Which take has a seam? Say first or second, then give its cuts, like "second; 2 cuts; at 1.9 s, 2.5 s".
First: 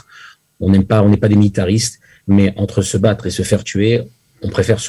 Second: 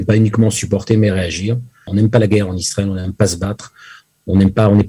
second; 1 cut; at 1.7 s